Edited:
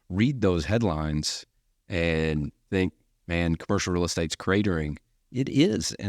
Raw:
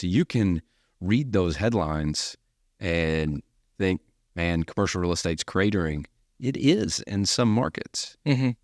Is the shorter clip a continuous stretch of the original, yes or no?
no